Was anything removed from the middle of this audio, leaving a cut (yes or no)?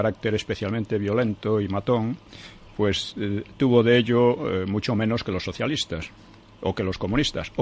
no